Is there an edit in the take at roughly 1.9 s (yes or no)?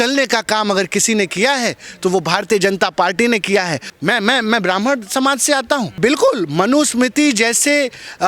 no